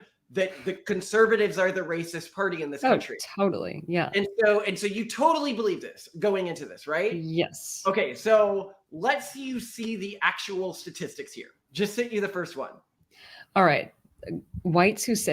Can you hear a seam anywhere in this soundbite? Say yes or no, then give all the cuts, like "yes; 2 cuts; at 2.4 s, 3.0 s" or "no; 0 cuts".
no; 0 cuts